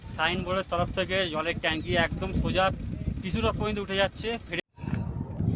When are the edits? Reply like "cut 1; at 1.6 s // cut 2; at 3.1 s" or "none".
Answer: cut 1; at 4.6 s